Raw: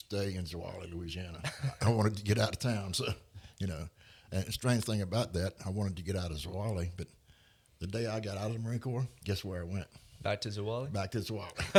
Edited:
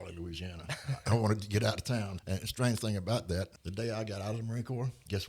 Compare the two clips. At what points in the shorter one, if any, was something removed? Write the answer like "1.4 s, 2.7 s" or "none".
2.1 s, 3.5 s